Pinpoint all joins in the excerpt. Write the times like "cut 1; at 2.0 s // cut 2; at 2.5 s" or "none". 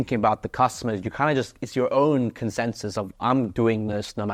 none